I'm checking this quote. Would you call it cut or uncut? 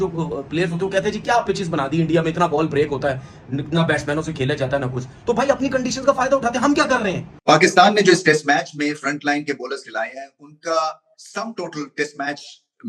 cut